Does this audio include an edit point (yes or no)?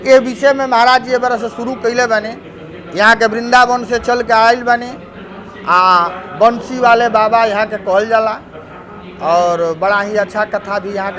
no